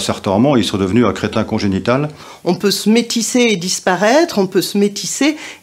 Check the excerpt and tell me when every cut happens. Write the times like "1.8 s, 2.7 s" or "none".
2.3 s